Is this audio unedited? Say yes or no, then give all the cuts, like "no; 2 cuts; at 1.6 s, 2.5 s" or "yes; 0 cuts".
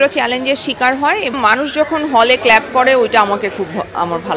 no; 1 cut; at 1.3 s